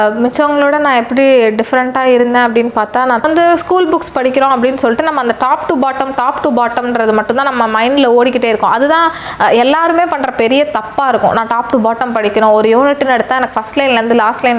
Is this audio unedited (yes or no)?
no